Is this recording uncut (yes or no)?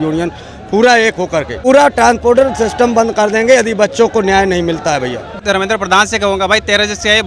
no